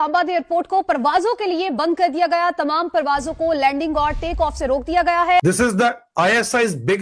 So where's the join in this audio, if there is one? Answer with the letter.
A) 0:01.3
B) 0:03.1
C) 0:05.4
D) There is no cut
C